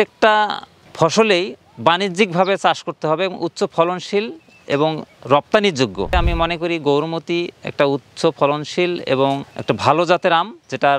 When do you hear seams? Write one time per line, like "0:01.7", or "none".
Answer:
0:06.1
0:09.5